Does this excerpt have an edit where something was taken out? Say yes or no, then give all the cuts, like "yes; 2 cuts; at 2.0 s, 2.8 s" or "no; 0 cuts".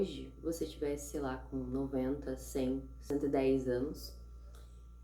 yes; 1 cut; at 3.0 s